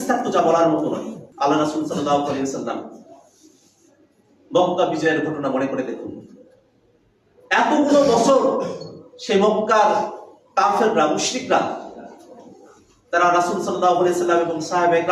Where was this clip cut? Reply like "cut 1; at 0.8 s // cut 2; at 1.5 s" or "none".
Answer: cut 1; at 1.2 s